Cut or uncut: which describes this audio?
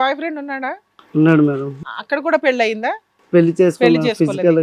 cut